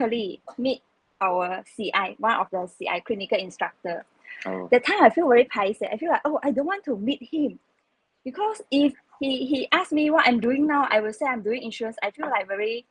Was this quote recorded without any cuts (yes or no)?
yes